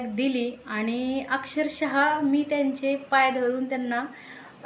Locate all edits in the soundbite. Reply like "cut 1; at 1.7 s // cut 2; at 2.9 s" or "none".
none

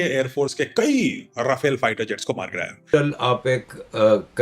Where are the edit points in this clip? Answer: cut 1; at 2.8 s

